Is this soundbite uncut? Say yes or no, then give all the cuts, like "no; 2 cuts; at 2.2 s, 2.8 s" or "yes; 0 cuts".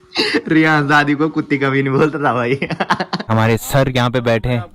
no; 1 cut; at 3.3 s